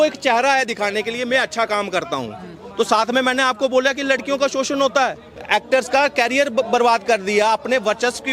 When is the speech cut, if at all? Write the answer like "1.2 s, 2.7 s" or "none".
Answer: 5.3 s